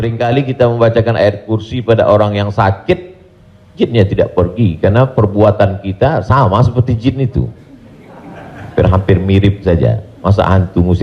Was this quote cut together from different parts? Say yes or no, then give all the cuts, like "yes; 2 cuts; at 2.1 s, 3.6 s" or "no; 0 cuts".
no; 0 cuts